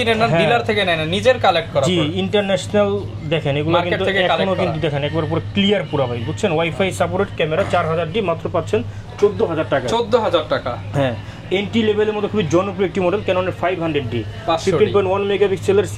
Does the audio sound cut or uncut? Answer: uncut